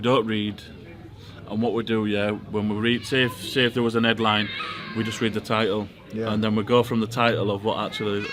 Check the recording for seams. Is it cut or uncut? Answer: uncut